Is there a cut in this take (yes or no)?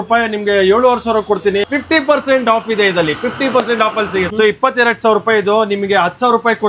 yes